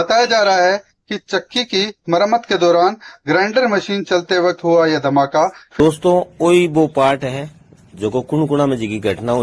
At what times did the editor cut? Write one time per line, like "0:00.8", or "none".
0:05.8